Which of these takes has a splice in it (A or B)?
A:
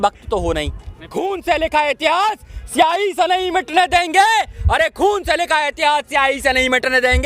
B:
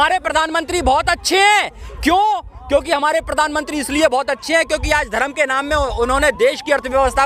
A